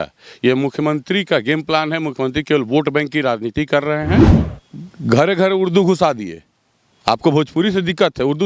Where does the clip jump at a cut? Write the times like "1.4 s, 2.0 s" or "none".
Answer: 4.4 s